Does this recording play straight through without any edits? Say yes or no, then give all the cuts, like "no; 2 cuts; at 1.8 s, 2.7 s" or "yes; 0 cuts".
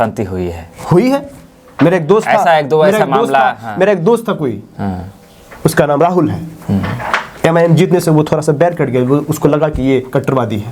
yes; 0 cuts